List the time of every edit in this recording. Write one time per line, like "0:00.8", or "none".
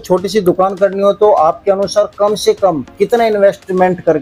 none

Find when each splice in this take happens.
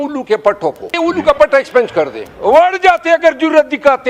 0:00.9
0:02.2

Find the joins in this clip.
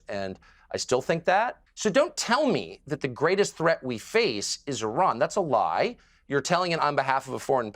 0:01.6

